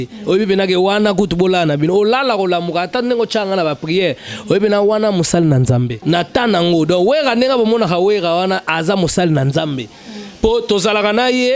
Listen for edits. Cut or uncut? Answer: cut